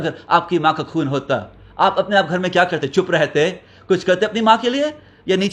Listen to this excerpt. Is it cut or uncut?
uncut